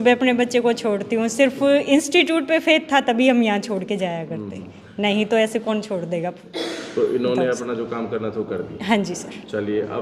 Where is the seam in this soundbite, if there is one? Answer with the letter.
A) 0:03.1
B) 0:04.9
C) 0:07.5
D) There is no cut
D